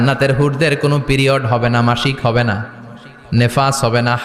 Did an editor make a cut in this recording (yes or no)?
no